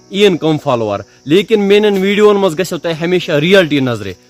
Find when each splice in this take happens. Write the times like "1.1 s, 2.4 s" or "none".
none

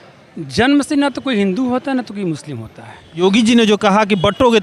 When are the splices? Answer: 3.2 s

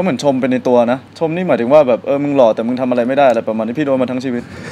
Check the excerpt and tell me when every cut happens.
none

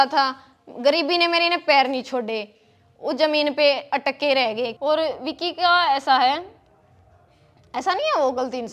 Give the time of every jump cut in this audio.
4.7 s

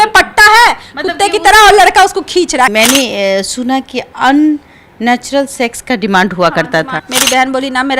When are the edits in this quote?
2.7 s, 7.0 s

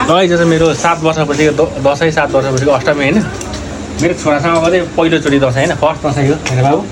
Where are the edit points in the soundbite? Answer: none

